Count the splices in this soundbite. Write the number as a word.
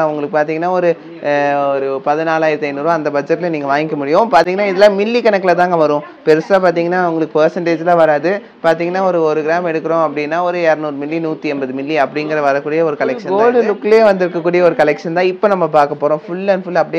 zero